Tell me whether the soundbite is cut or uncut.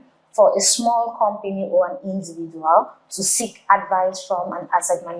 uncut